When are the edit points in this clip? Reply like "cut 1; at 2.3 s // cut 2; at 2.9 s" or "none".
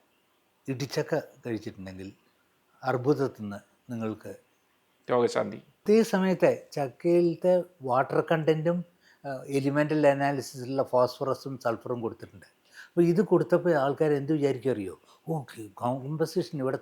cut 1; at 5.8 s